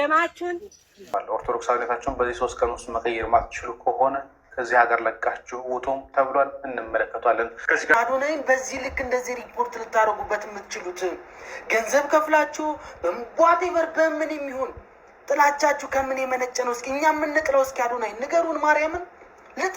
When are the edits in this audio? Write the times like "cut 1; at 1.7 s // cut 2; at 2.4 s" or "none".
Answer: cut 1; at 1.0 s // cut 2; at 7.9 s